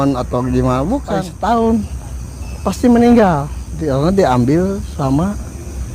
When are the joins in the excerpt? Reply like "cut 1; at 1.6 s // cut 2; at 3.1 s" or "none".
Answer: cut 1; at 1.3 s